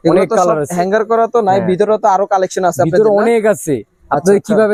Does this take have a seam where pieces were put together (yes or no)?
no